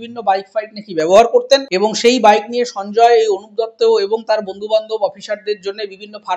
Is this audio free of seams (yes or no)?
no